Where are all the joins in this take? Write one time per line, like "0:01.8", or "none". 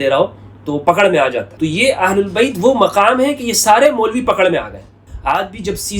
0:01.5
0:05.1